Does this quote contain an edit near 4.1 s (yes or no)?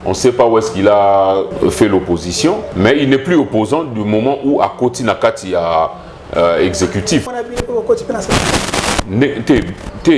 no